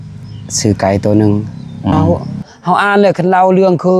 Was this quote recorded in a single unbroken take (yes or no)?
no